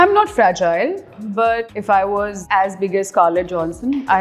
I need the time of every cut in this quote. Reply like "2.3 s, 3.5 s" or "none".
1.7 s, 2.4 s

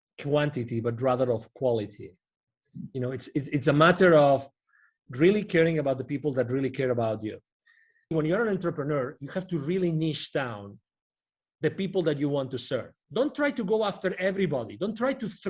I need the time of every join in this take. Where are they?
8.1 s, 13.0 s

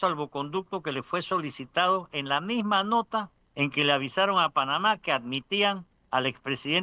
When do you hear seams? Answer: 3.4 s, 5.9 s

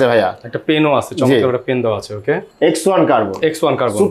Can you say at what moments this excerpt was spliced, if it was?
2.5 s

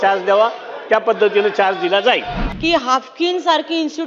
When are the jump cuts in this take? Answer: 2.4 s

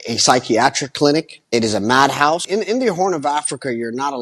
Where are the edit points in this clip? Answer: 1.4 s, 2.5 s

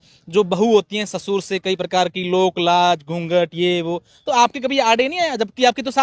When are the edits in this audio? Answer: none

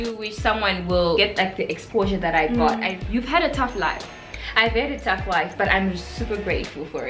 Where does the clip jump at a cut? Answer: 1.2 s, 2.9 s

